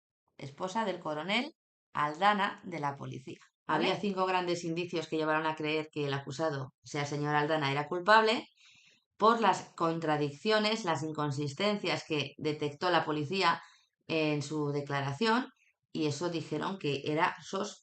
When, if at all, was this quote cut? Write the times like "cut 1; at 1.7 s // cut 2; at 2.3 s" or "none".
cut 1; at 3.9 s